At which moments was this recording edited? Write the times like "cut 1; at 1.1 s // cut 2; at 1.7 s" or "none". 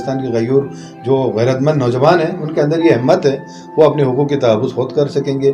none